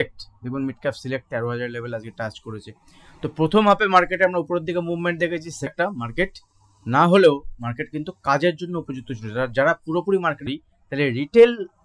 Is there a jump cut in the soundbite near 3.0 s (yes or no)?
no